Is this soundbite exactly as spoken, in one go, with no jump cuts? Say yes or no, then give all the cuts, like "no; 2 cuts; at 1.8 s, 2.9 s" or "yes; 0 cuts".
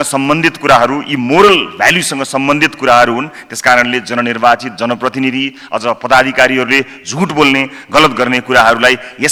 yes; 0 cuts